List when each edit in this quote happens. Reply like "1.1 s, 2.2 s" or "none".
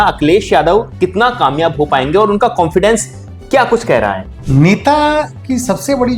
4.3 s